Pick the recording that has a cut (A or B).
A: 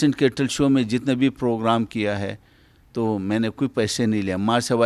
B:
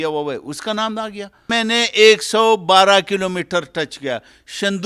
B